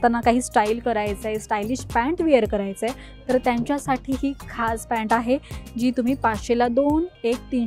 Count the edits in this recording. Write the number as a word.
zero